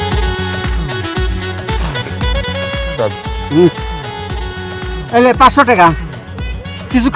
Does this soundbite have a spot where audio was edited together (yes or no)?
no